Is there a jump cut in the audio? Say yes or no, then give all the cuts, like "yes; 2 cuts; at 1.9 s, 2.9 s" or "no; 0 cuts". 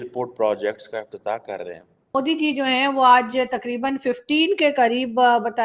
yes; 1 cut; at 2.2 s